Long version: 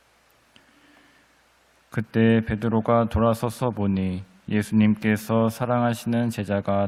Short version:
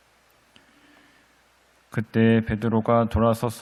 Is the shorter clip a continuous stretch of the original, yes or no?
yes